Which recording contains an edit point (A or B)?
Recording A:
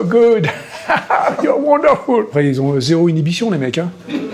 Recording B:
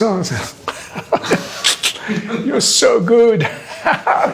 A